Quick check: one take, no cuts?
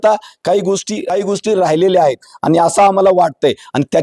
no; 1 cut; at 0.9 s

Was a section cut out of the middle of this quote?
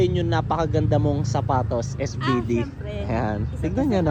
no; 0 cuts

